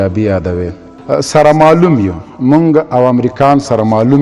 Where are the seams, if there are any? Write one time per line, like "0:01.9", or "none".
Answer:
0:01.0